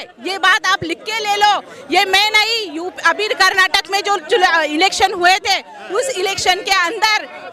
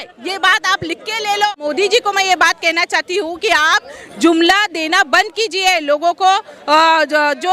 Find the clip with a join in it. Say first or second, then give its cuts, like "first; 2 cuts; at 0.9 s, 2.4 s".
second; 1 cut; at 1.6 s